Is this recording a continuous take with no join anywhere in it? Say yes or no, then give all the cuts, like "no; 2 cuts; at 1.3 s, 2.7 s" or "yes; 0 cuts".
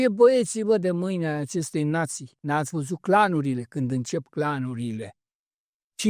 no; 1 cut; at 2.3 s